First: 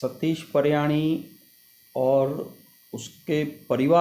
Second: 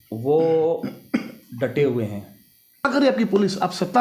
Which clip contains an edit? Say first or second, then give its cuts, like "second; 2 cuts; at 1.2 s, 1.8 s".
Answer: second; 1 cut; at 2.9 s